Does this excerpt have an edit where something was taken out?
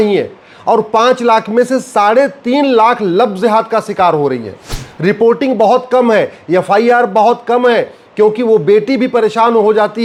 no; 0 cuts

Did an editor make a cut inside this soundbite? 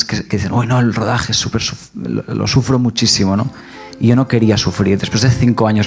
no; 0 cuts

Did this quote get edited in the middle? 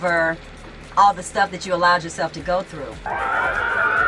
no; 0 cuts

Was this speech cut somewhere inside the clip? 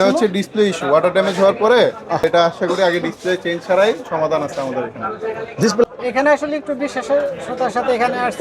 yes; 2 cuts; at 2.2 s, 5.8 s

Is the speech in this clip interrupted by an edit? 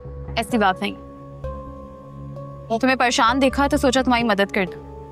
no; 0 cuts

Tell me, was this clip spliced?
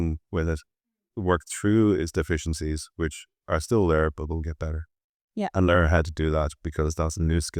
no; 0 cuts

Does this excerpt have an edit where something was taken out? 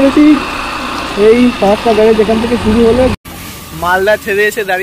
yes; 1 cut; at 3.1 s

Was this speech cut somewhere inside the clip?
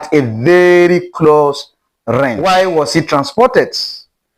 yes; 1 cut; at 2.4 s

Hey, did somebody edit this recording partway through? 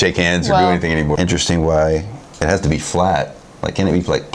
yes; 1 cut; at 1.2 s

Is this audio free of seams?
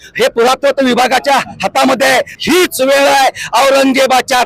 no; 1 cut; at 2.3 s

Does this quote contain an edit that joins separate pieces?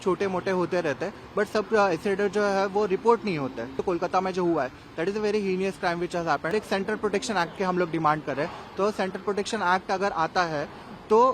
yes; 2 cuts; at 3.8 s, 6.5 s

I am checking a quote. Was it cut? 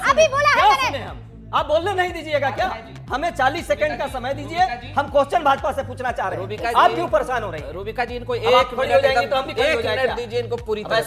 yes; 1 cut; at 1.4 s

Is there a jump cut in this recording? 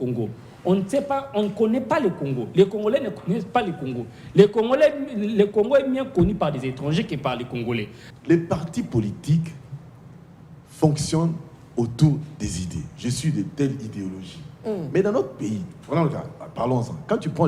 yes; 1 cut; at 8.0 s

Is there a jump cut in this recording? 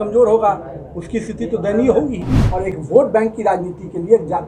yes; 1 cut; at 2.3 s

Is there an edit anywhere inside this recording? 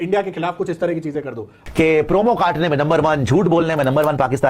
yes; 1 cut; at 1.6 s

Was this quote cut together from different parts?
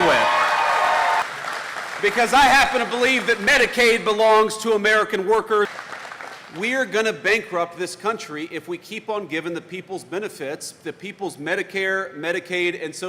yes; 1 cut; at 5.7 s

